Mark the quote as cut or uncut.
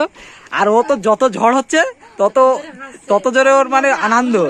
uncut